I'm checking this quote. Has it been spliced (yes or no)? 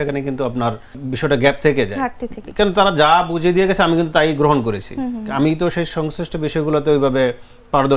yes